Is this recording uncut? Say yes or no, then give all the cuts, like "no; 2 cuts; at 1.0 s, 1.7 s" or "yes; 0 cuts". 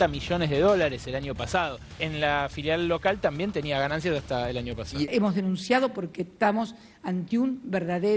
no; 1 cut; at 5.1 s